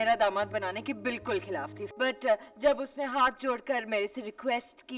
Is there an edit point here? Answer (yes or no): yes